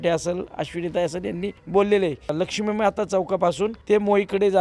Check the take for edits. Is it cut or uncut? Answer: cut